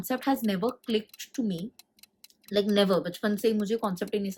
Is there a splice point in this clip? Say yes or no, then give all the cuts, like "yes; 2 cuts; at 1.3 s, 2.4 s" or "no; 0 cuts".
no; 0 cuts